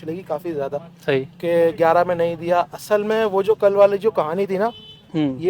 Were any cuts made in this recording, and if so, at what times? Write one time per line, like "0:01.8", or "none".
none